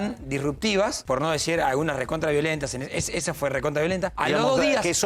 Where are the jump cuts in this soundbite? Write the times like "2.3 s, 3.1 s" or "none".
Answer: 1.0 s, 4.1 s